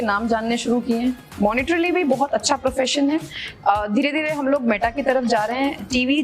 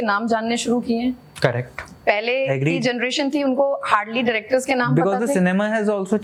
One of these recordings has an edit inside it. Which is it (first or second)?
first